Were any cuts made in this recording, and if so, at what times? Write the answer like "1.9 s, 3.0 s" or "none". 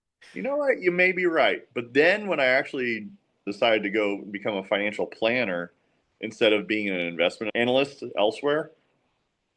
3.5 s, 7.4 s